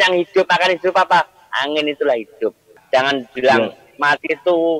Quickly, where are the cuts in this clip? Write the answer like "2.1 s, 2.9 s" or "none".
2.7 s